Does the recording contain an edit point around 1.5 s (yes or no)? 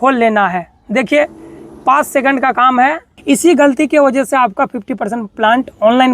no